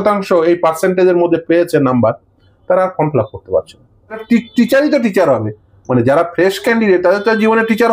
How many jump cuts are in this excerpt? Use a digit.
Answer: 1